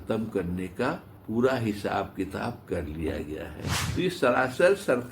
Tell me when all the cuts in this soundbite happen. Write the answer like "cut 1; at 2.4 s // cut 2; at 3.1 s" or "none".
cut 1; at 1.1 s // cut 2; at 3.8 s